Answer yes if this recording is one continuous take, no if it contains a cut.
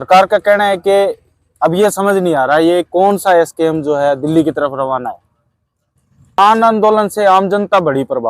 no